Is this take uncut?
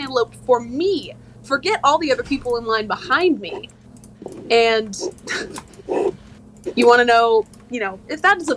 yes; 0 cuts

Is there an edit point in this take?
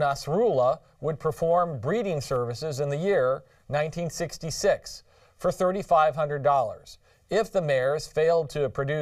no; 0 cuts

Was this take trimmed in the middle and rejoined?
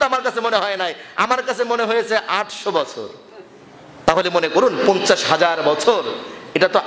yes; 1 cut; at 4.1 s

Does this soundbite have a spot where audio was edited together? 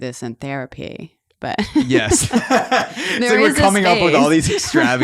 no; 0 cuts

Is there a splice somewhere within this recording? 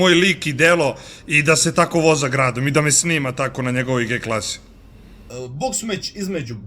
yes; 1 cut; at 5.2 s

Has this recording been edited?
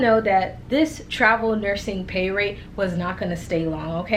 no; 0 cuts

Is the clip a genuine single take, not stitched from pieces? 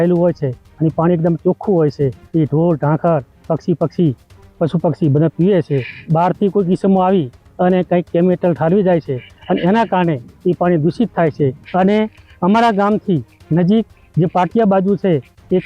no; 3 cuts; at 2.2 s, 5.9 s, 11.6 s

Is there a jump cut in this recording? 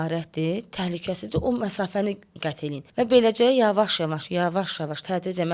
yes; 1 cut; at 2.8 s

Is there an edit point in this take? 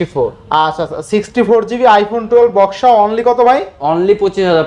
no; 0 cuts

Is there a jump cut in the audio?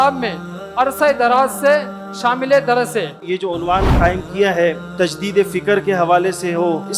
yes; 1 cut; at 3.2 s

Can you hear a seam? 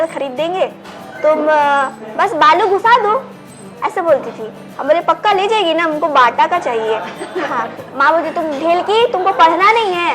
yes; 1 cut; at 7.8 s

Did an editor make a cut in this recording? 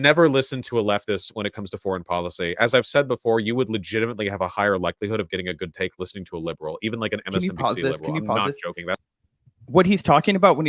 no; 0 cuts

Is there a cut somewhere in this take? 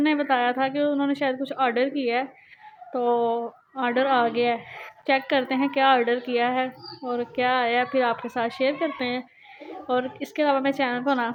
no; 0 cuts

